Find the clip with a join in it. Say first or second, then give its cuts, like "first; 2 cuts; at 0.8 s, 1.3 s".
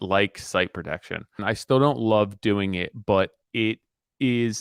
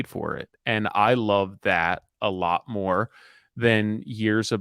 first; 1 cut; at 1.3 s